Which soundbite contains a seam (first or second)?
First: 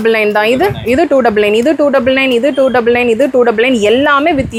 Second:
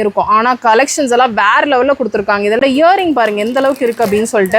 second